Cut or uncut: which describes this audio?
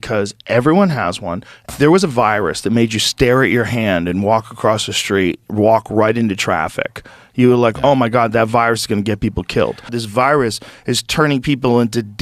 uncut